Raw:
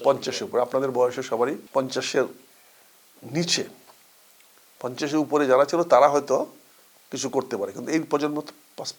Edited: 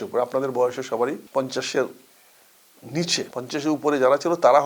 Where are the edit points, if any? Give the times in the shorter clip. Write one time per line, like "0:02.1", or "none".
0:03.3